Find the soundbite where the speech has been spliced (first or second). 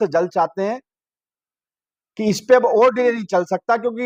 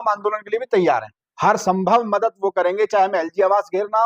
second